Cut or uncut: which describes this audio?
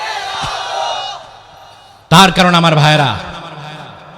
uncut